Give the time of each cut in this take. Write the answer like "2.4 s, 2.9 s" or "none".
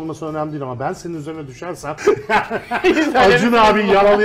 1.9 s